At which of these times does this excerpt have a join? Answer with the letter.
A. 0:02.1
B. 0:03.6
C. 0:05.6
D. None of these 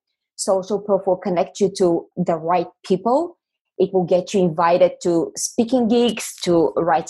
A